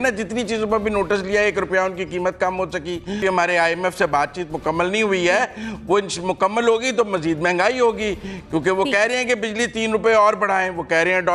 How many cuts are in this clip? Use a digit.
1